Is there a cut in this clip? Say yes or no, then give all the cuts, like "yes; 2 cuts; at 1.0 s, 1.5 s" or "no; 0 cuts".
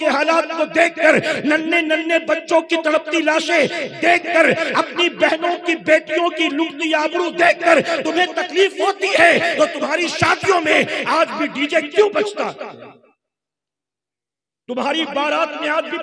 no; 0 cuts